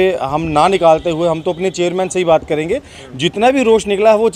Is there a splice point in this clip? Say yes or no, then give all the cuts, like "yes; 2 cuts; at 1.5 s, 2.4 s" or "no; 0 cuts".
no; 0 cuts